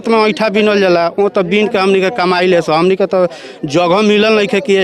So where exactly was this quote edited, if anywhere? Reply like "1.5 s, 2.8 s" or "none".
none